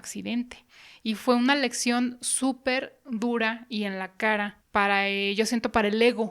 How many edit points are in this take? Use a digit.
1